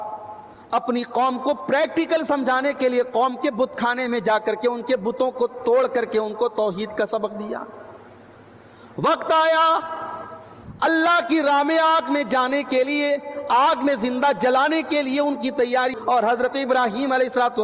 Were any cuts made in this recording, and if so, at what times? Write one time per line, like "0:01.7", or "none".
0:15.9